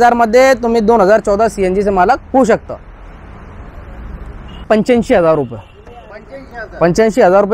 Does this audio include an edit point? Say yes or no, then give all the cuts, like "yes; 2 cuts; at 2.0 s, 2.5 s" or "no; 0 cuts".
yes; 1 cut; at 4.6 s